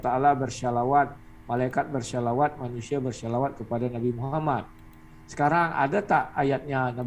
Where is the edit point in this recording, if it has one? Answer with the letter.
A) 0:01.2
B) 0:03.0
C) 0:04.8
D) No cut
D